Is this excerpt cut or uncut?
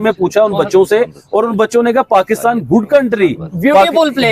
cut